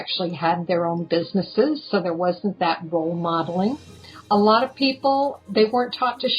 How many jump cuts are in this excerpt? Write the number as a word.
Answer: one